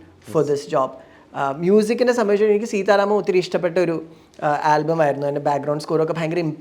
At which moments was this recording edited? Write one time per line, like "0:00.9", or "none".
none